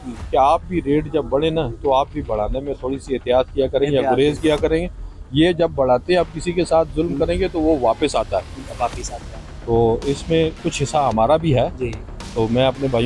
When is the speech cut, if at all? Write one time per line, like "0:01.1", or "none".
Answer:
none